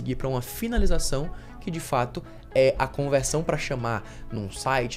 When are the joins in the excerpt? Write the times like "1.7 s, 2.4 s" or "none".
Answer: none